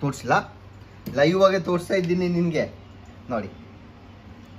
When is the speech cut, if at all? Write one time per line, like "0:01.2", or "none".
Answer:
none